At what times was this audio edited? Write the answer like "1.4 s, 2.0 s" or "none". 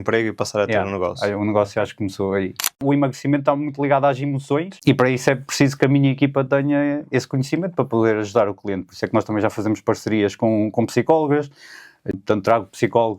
2.8 s, 4.7 s, 12.1 s